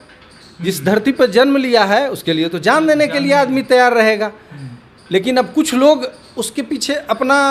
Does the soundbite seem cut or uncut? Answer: uncut